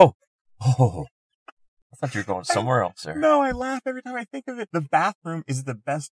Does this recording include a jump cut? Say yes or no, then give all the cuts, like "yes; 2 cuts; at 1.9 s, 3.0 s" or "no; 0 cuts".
yes; 1 cut; at 4.6 s